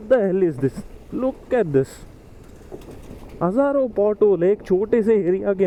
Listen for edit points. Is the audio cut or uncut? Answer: uncut